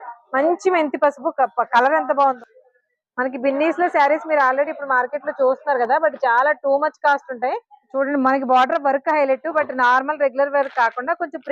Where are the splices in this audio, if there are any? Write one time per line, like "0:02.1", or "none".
0:02.4
0:07.8